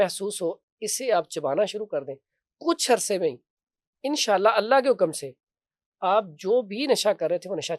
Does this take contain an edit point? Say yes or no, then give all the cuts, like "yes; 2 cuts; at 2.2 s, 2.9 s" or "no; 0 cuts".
no; 0 cuts